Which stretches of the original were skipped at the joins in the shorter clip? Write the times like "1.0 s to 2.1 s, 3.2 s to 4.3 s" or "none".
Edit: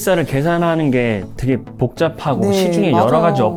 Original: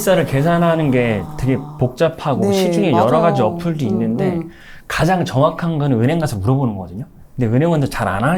none